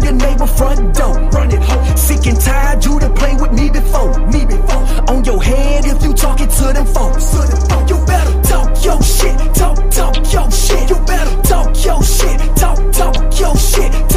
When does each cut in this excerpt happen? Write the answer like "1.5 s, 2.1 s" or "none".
13.2 s